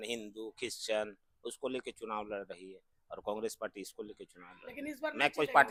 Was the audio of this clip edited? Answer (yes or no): no